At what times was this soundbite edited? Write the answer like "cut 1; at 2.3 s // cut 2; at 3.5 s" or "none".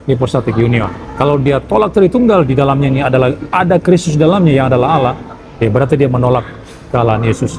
cut 1; at 1.0 s

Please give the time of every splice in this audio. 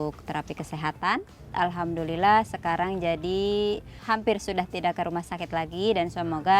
cut 1; at 1.5 s // cut 2; at 4.0 s

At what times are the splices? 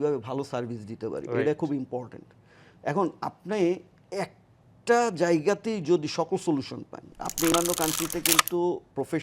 cut 1; at 7.5 s

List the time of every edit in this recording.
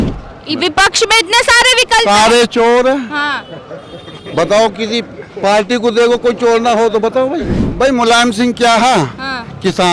cut 1; at 7.6 s

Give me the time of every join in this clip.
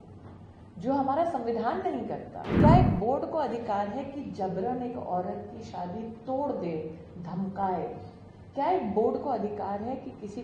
cut 1; at 2.6 s

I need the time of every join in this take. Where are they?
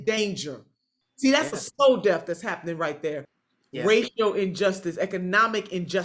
cut 1; at 3.3 s

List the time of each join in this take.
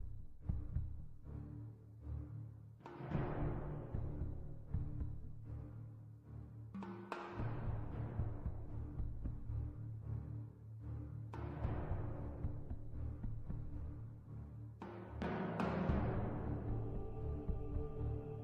none

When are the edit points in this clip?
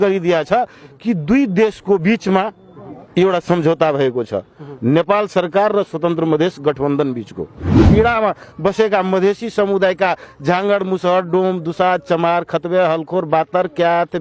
cut 1; at 7.8 s

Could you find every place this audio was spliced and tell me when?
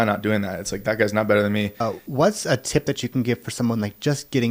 cut 1; at 1.8 s

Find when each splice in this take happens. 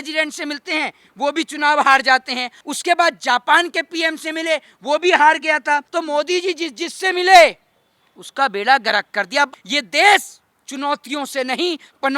cut 1; at 2.6 s // cut 2; at 5.9 s // cut 3; at 9.5 s

